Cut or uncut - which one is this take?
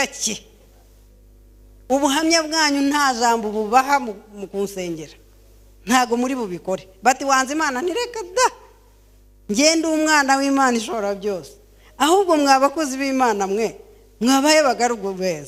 uncut